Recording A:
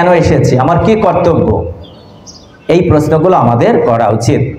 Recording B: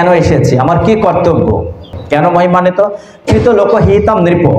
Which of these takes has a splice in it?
B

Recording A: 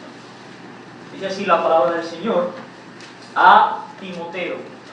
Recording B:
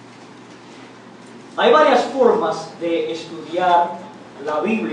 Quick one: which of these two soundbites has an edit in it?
A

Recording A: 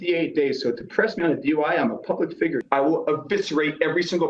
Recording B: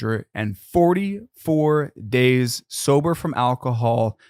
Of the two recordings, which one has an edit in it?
A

